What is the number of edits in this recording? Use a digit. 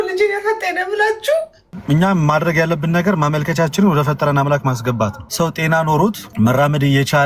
3